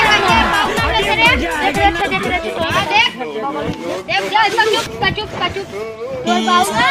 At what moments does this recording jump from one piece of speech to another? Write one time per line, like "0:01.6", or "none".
none